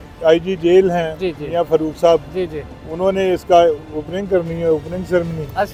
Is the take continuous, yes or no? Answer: yes